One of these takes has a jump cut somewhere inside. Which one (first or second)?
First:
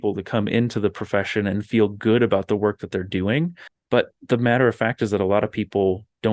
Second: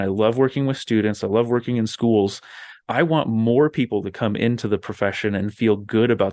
first